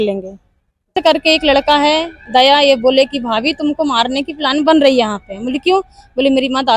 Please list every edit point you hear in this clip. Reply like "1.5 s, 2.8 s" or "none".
0.9 s